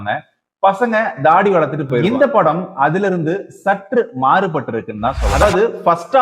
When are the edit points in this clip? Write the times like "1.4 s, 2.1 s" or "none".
2.1 s, 5.4 s